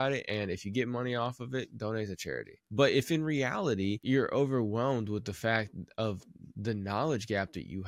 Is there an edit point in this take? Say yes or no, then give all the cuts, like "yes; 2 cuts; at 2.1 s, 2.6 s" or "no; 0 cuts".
yes; 2 cuts; at 2.6 s, 4.0 s